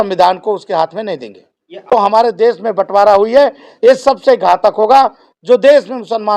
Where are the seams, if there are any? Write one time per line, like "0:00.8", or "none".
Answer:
0:01.9